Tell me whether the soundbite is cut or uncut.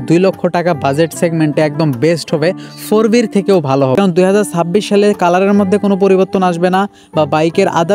cut